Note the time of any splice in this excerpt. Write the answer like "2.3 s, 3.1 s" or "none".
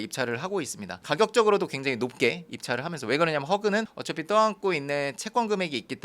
1.0 s